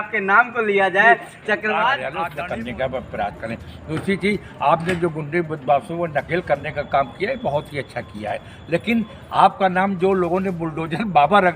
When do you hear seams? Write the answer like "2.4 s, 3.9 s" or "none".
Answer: 2.1 s